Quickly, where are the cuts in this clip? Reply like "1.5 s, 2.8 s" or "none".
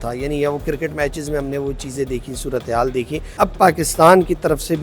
3.4 s

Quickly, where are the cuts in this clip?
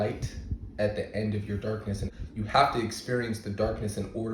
2.1 s

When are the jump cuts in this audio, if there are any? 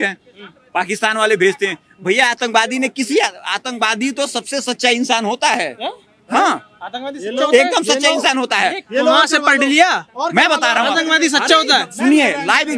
none

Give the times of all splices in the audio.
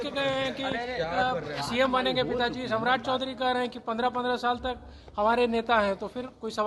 none

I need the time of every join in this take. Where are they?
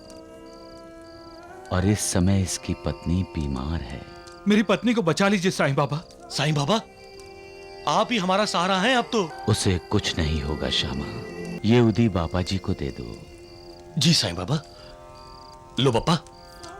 9.4 s, 11.6 s

